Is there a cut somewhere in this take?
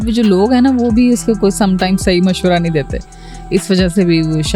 no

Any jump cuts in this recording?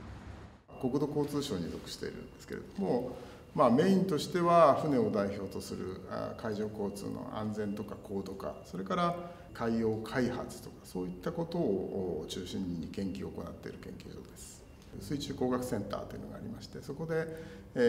no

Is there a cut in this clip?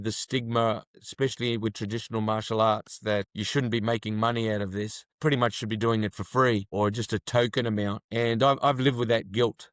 yes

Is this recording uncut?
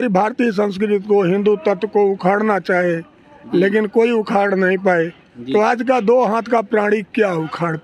yes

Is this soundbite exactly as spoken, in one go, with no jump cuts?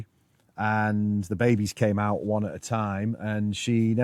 yes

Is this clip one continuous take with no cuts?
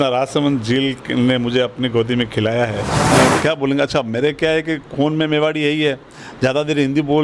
no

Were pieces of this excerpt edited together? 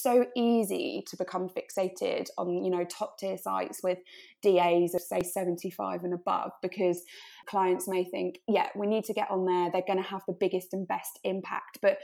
no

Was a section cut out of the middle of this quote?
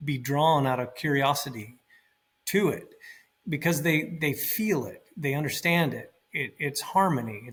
no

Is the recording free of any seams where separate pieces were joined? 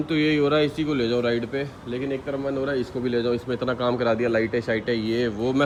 yes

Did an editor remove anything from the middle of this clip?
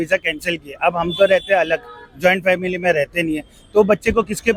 no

